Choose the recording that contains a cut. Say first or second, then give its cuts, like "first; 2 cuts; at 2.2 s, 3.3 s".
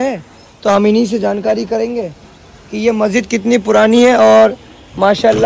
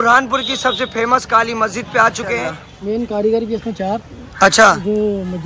second; 1 cut; at 2.7 s